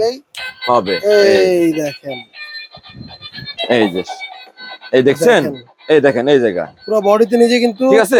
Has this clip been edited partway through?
no; 0 cuts

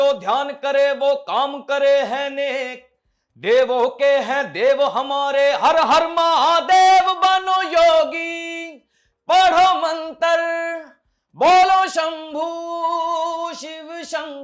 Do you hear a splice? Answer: no; 0 cuts

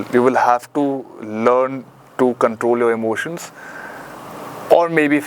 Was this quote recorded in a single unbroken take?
yes; 0 cuts

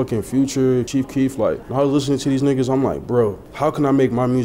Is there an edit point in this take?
yes; 2 cuts; at 1.2 s, 3.4 s

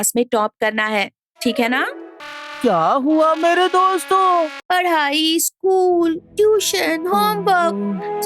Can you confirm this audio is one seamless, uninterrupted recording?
no; 2 cuts; at 2.1 s, 4.6 s

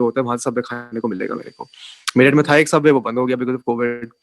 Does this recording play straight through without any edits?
yes; 0 cuts

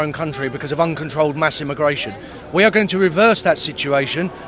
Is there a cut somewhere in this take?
no; 0 cuts

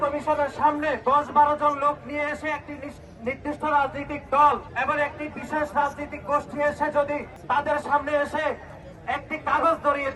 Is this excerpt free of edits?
no; 3 cuts; at 1.0 s, 4.7 s, 7.3 s

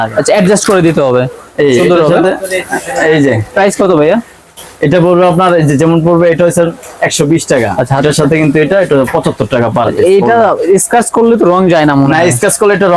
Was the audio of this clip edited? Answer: no; 0 cuts

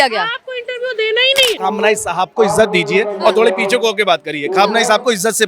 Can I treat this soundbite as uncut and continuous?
no; 1 cut; at 1.6 s

